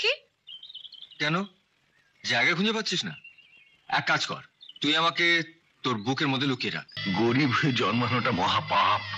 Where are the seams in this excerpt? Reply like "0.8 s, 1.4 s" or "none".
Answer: 6.9 s